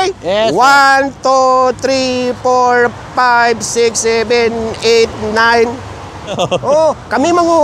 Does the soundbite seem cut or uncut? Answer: cut